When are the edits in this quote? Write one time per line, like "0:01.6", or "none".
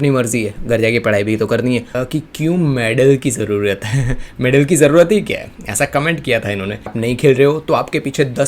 0:01.9
0:06.9